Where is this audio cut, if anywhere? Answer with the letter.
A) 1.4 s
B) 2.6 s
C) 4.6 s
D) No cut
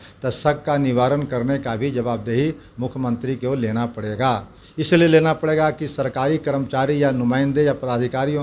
D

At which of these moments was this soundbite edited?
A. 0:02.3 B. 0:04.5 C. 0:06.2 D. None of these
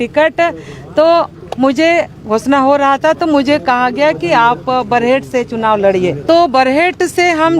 C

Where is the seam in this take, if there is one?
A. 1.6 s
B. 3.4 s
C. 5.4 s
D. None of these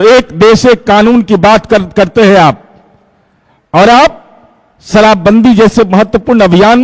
D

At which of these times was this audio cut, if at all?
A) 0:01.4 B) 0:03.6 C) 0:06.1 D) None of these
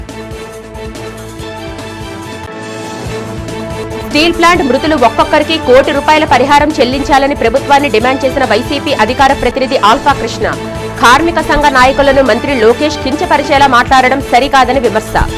D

